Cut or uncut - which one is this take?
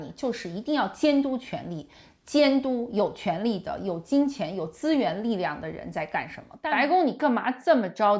cut